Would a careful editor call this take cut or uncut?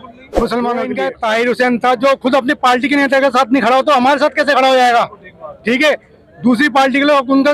cut